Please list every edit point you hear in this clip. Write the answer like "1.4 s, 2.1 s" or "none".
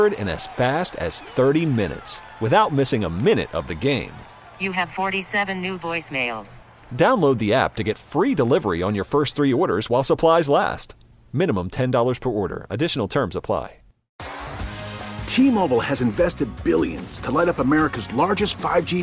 14.1 s

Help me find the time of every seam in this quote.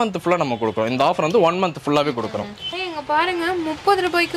2.8 s

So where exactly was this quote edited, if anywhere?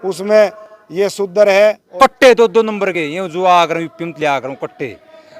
1.8 s

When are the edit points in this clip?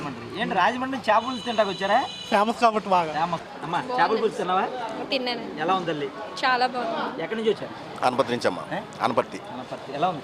3.4 s, 7.6 s

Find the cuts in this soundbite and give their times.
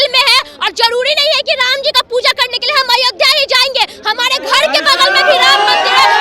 none

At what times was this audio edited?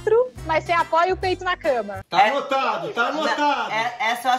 1.9 s

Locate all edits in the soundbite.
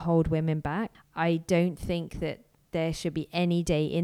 1.0 s

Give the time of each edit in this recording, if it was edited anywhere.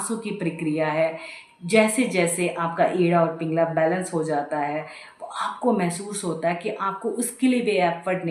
none

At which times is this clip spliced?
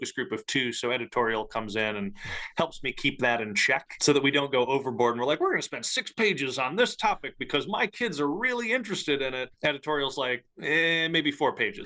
3.9 s, 9.5 s

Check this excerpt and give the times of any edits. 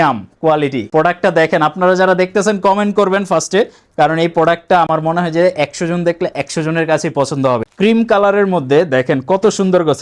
none

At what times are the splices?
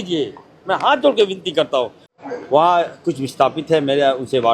2.0 s

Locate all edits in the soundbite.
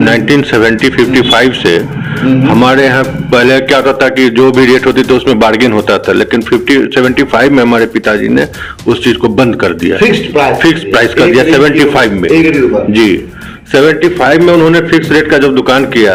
none

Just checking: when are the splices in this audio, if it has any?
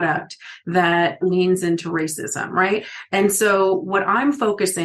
1.2 s

